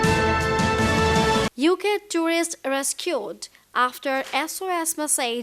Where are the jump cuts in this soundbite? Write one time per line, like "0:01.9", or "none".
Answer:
0:01.3